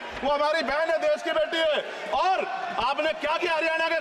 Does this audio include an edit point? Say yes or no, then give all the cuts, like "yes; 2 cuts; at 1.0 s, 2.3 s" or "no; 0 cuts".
no; 0 cuts